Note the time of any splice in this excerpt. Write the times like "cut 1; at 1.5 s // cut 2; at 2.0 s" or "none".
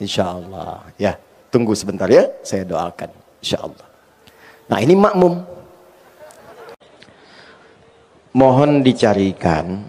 cut 1; at 6.6 s